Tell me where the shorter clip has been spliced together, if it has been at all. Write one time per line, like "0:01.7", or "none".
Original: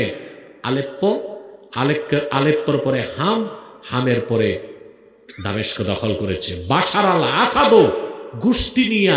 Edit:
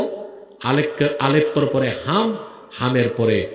none